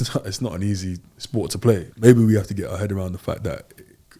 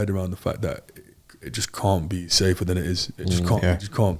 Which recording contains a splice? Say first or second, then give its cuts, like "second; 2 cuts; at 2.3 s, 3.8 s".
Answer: first; 1 cut; at 1.9 s